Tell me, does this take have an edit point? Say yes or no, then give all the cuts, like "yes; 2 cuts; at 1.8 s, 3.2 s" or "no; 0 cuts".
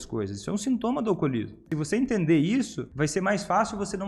yes; 2 cuts; at 1.6 s, 2.8 s